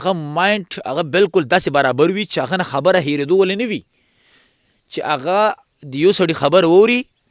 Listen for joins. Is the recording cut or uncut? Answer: uncut